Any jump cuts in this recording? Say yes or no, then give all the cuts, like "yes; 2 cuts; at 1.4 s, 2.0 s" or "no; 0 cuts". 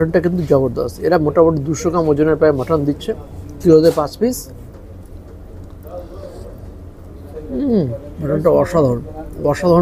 no; 0 cuts